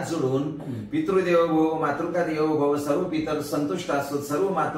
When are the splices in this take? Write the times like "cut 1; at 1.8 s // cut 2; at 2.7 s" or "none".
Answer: none